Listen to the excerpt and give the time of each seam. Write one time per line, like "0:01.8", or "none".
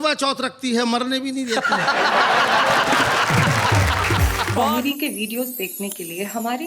0:04.6